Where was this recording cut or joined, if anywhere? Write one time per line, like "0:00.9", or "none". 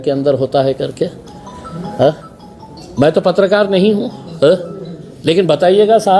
none